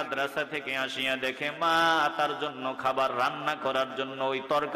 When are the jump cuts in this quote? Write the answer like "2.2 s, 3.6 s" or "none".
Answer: none